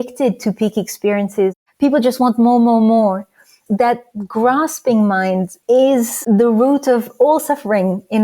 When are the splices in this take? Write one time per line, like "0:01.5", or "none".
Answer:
0:01.5
0:03.6
0:05.5
0:06.2